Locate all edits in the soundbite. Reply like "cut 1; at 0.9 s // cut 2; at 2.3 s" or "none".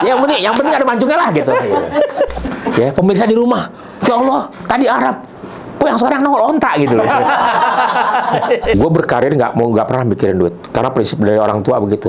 cut 1; at 2.3 s // cut 2; at 8.7 s

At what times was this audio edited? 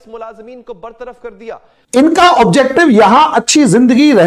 cut 1; at 1.7 s

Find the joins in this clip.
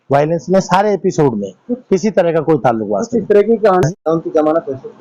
cut 1; at 3.8 s

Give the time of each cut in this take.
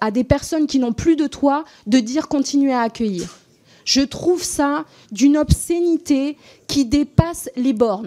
none

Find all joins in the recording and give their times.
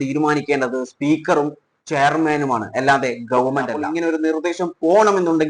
cut 1; at 3.8 s

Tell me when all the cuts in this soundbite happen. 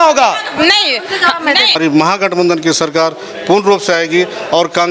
cut 1; at 1.7 s

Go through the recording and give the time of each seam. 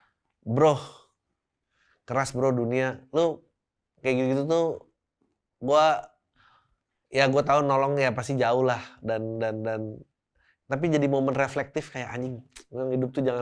none

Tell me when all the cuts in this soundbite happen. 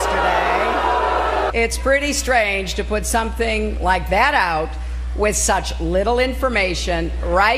none

